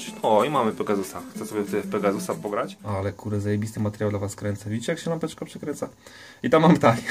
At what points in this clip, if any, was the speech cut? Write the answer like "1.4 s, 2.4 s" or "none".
2.8 s